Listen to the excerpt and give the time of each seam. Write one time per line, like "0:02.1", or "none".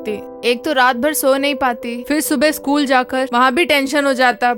none